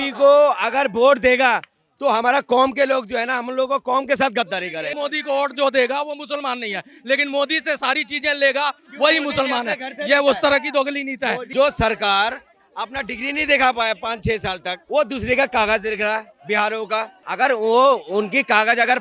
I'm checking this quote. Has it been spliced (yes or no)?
yes